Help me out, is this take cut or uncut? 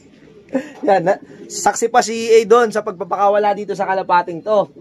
uncut